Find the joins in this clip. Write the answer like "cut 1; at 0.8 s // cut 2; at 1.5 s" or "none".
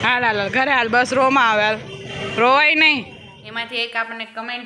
cut 1; at 3.1 s